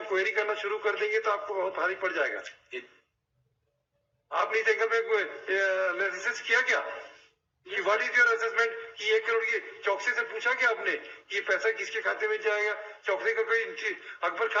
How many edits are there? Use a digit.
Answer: 0